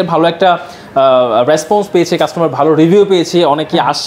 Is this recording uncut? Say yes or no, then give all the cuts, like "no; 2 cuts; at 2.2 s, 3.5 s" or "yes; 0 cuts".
yes; 0 cuts